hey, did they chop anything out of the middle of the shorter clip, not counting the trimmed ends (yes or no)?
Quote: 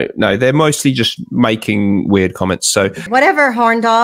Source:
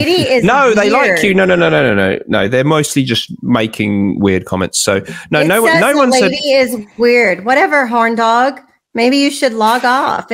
yes